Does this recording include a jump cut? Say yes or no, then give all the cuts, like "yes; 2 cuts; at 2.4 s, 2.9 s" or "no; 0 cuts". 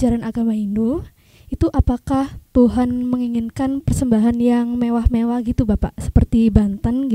no; 0 cuts